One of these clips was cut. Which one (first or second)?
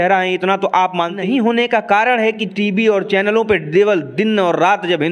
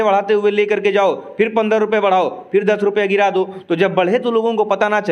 first